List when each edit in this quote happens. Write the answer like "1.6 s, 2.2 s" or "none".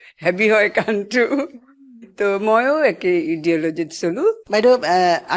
4.4 s